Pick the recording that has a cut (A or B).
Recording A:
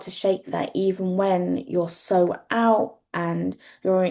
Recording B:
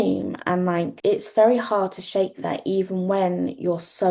B